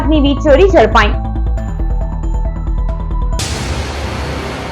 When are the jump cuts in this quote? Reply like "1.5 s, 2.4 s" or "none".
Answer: 3.4 s